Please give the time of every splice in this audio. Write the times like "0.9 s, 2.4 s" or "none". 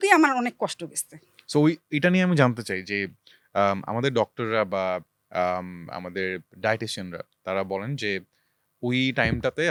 none